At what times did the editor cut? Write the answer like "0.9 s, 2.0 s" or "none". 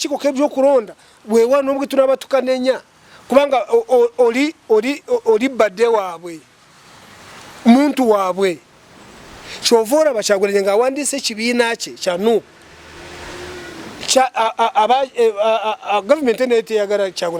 none